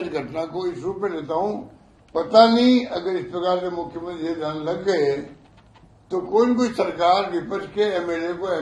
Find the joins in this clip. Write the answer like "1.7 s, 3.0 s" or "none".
none